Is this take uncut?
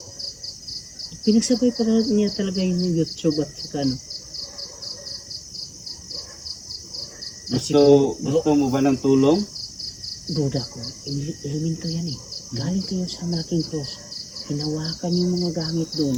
yes; 0 cuts

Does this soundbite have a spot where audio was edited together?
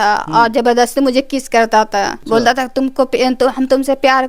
yes; 1 cut; at 2.2 s

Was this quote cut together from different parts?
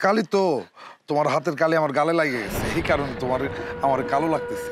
no; 0 cuts

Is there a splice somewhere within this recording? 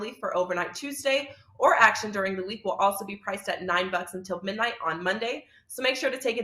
yes; 1 cut; at 2.1 s

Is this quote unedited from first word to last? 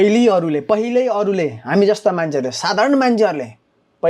yes; 0 cuts

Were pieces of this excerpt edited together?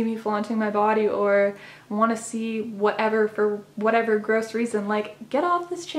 no; 0 cuts

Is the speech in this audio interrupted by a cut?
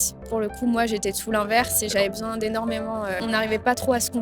yes; 1 cut; at 3.2 s

